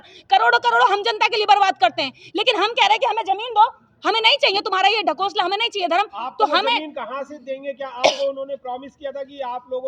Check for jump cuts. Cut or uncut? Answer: uncut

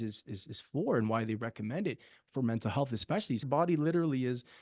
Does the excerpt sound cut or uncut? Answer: cut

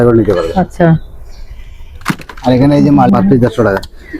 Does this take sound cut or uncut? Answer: cut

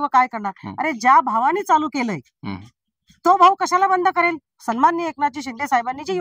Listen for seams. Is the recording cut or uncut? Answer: uncut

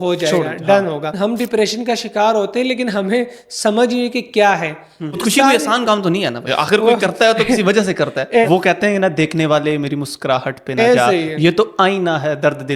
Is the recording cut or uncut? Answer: cut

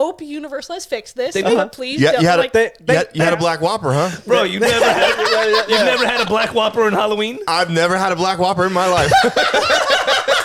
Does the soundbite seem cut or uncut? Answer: uncut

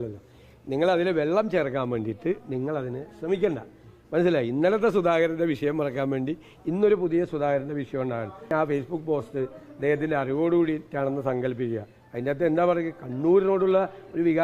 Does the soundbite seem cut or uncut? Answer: cut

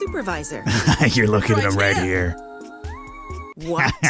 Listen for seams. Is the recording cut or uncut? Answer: uncut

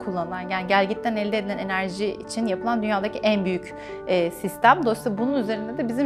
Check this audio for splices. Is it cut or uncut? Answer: uncut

